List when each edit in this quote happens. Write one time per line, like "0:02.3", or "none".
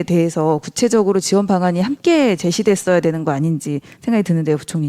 none